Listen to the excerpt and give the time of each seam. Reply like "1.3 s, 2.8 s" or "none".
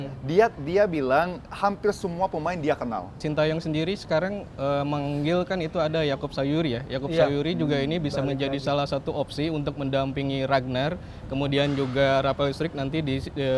3.2 s

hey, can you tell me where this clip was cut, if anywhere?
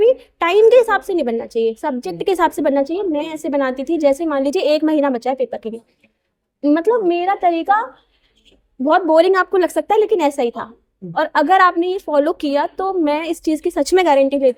none

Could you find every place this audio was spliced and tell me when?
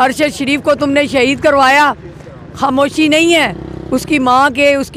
none

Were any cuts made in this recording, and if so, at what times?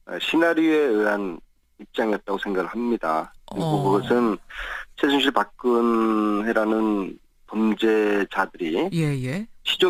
none

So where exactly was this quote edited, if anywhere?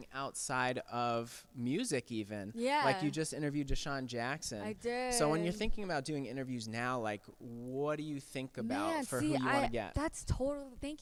none

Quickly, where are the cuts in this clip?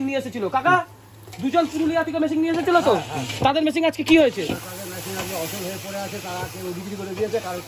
none

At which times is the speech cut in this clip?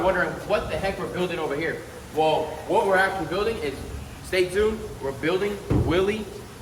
none

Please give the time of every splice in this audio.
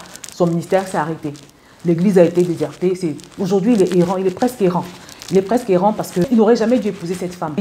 6.3 s

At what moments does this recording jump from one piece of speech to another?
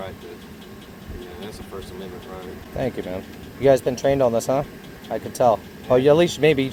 none

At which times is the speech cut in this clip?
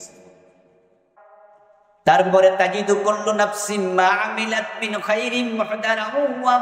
1.2 s

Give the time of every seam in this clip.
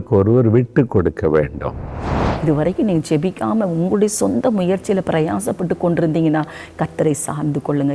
2.2 s

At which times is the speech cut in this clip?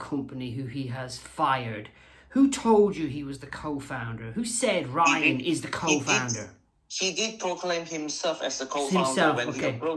none

